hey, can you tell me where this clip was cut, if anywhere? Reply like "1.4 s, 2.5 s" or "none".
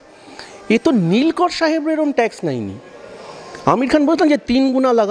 none